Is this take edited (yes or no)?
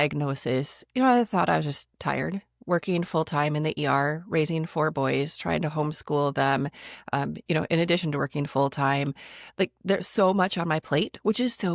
no